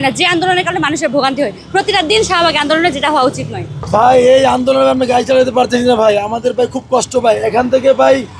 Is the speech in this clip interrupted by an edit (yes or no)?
no